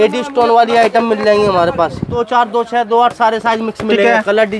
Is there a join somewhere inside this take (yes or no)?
yes